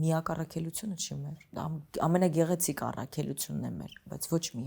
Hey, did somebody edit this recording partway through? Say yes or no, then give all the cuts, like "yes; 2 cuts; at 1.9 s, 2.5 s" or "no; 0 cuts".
no; 0 cuts